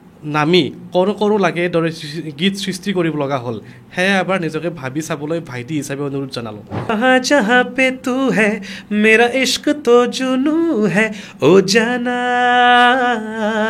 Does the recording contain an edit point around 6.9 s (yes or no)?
yes